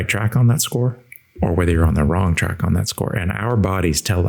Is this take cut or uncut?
uncut